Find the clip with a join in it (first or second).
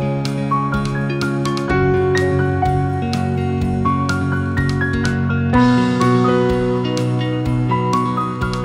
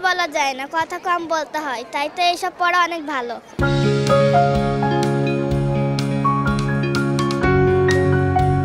second